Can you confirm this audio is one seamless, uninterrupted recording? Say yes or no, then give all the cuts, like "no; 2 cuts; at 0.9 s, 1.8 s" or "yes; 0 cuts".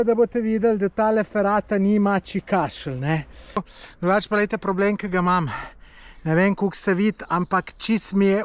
no; 1 cut; at 3.7 s